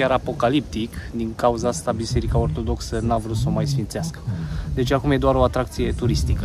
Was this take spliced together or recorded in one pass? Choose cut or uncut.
uncut